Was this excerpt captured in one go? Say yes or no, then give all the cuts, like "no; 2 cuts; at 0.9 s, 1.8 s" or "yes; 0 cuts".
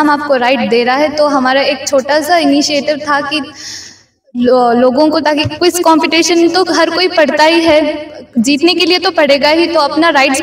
yes; 0 cuts